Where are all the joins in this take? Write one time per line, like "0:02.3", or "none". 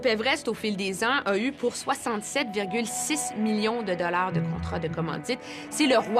none